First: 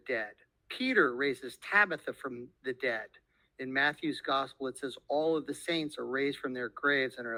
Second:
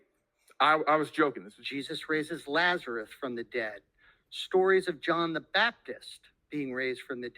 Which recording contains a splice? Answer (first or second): second